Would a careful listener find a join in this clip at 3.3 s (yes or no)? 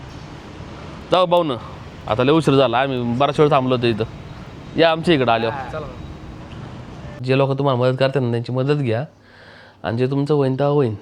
no